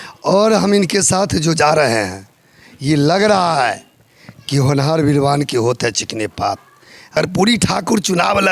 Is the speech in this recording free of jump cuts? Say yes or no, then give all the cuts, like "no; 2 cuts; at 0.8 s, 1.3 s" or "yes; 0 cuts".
no; 1 cut; at 7.1 s